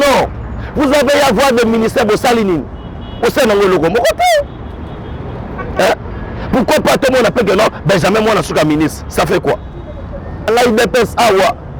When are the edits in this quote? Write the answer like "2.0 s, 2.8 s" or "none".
10.5 s